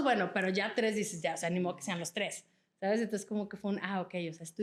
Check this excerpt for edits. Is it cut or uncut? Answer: uncut